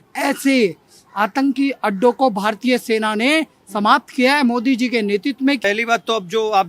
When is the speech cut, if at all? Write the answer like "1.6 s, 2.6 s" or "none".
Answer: 5.6 s